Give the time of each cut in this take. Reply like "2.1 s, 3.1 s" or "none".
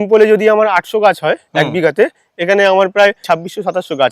3.2 s